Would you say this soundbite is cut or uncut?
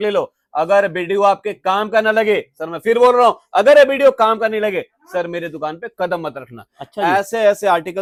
uncut